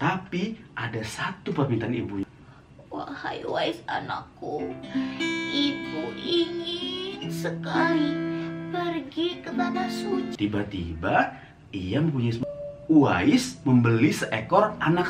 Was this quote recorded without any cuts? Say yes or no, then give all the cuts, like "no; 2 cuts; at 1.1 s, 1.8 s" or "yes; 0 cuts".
no; 3 cuts; at 2.3 s, 10.3 s, 12.4 s